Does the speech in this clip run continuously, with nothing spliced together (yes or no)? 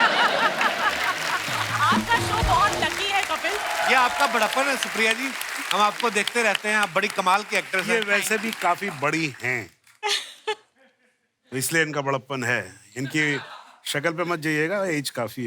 no